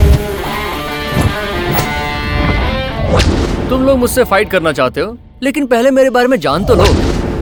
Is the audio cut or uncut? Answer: uncut